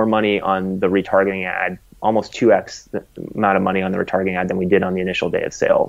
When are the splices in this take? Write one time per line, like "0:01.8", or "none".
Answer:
none